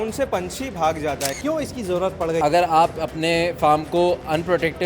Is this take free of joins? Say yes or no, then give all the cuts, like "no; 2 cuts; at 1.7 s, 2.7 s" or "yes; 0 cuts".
no; 2 cuts; at 1.3 s, 2.4 s